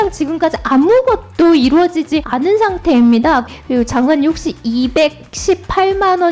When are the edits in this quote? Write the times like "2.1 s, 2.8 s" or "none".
2.3 s, 3.5 s

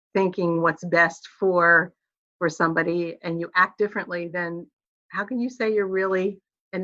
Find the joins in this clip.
none

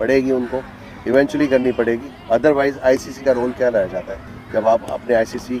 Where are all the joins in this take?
none

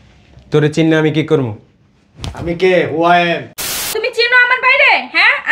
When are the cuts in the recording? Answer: 3.9 s

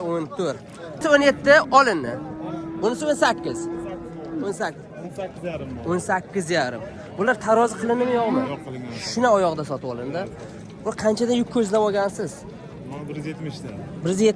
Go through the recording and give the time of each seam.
1.0 s

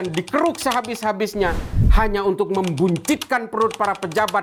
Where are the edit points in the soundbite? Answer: none

